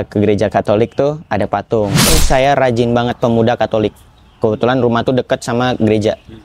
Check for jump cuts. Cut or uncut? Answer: cut